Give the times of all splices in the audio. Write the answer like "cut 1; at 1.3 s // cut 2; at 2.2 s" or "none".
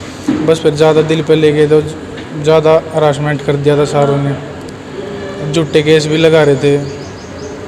none